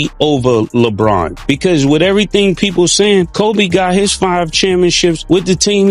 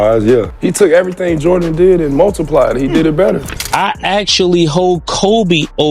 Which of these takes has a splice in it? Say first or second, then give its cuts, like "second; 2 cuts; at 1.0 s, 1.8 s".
second; 1 cut; at 3.6 s